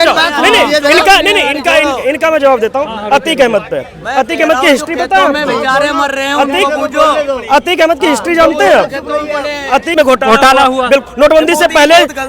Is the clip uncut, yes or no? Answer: no